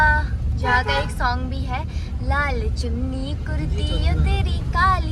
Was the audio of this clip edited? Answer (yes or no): no